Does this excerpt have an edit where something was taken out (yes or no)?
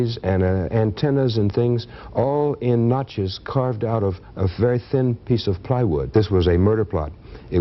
yes